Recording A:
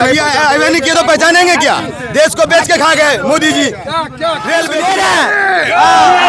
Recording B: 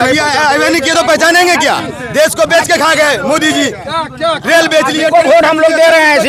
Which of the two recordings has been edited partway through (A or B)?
A